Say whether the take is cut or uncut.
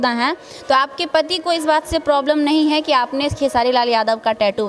uncut